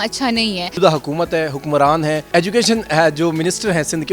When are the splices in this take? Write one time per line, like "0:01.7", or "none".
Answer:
0:00.8
0:02.2